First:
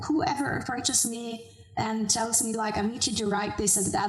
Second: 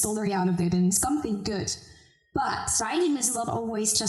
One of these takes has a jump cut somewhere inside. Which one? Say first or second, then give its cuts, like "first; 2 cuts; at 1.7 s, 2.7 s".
second; 1 cut; at 2.8 s